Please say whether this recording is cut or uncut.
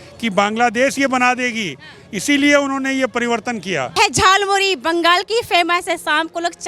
cut